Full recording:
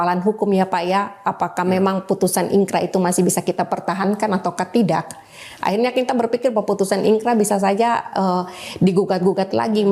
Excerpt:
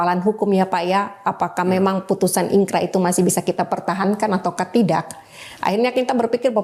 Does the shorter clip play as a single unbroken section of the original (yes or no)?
yes